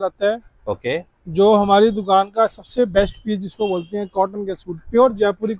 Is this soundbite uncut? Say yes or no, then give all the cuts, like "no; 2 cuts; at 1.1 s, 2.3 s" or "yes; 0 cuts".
yes; 0 cuts